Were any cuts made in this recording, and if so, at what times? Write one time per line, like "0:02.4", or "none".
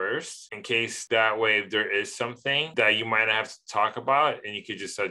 0:01.0